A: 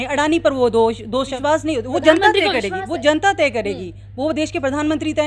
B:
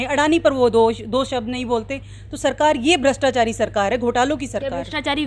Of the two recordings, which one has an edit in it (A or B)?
A